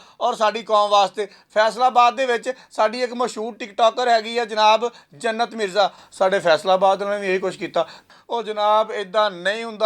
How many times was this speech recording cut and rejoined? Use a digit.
2